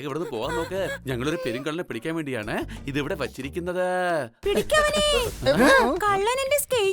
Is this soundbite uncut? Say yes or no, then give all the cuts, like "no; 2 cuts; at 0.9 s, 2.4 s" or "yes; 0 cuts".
no; 1 cut; at 4.4 s